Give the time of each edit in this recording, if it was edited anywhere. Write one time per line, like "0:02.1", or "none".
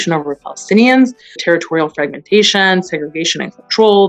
0:01.3